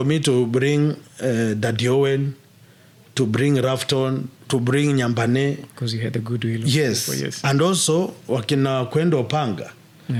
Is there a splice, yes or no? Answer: no